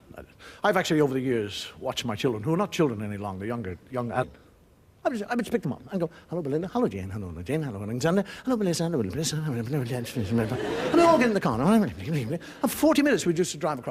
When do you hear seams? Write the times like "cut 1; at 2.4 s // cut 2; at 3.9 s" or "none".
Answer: none